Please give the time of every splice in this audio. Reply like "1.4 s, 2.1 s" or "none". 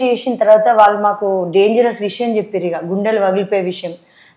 none